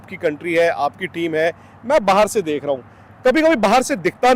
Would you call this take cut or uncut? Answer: uncut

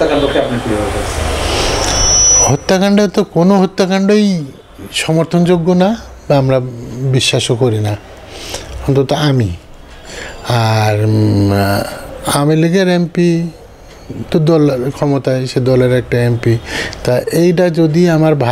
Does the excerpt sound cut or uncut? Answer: uncut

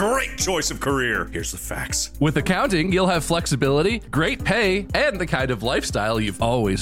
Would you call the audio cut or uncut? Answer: uncut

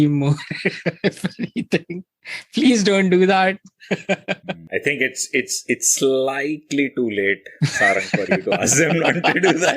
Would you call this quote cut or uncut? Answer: cut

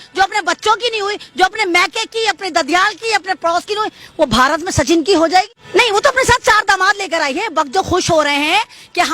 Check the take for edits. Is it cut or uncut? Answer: cut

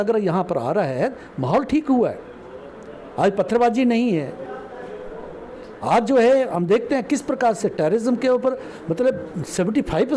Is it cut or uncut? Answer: uncut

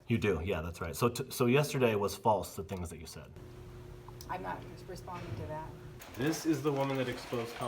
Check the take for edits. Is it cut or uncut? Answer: cut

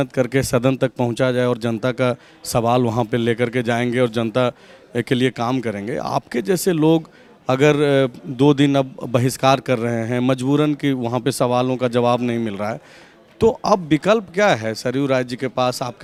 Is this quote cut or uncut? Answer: uncut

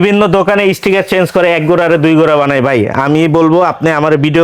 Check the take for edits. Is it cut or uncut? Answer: uncut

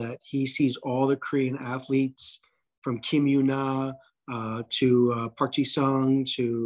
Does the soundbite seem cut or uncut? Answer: uncut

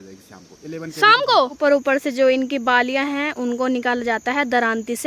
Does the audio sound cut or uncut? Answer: cut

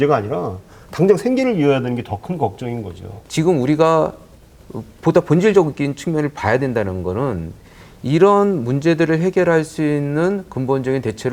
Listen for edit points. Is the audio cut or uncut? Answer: uncut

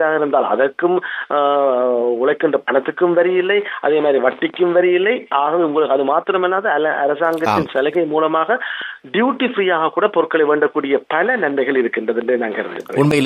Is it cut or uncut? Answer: uncut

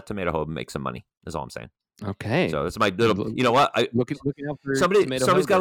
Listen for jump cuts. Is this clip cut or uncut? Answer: cut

